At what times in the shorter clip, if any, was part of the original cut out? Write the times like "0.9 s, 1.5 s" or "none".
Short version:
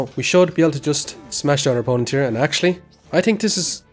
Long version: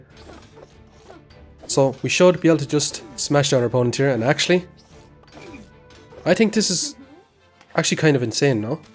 2.9 s